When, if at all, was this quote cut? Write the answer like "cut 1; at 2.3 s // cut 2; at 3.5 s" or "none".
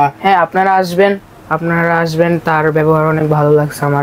none